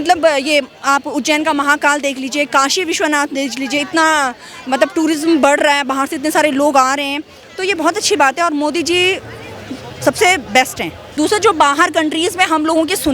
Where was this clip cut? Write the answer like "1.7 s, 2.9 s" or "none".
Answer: 11.0 s